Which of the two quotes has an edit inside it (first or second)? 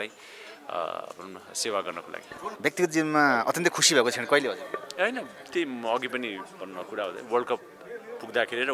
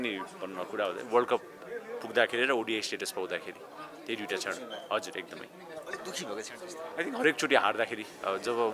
first